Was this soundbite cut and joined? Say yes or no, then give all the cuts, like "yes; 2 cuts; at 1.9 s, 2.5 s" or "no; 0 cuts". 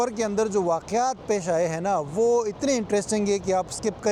no; 0 cuts